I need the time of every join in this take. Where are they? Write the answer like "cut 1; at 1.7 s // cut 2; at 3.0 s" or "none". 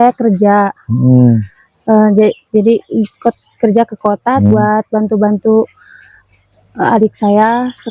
cut 1; at 4.4 s